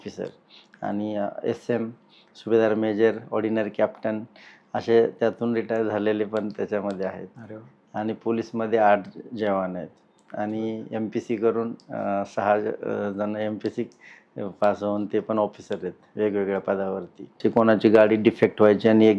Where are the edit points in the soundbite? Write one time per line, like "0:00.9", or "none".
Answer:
0:17.4